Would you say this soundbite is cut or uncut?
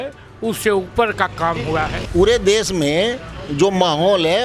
cut